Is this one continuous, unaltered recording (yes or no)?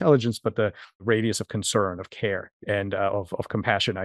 no